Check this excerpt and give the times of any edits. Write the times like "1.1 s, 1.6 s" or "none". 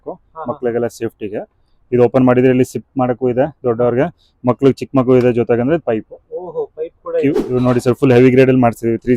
7.4 s